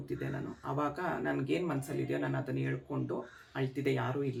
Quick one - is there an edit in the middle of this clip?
no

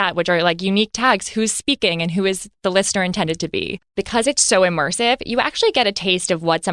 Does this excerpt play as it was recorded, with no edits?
no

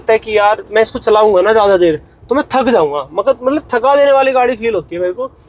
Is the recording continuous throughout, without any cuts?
yes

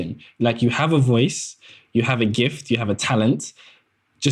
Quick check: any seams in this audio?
no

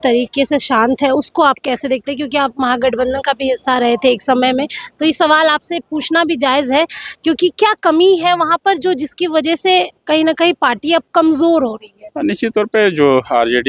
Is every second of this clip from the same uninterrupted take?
yes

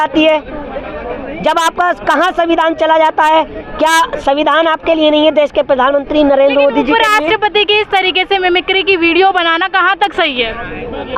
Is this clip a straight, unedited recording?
yes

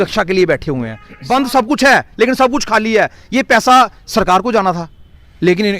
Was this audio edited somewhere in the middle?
yes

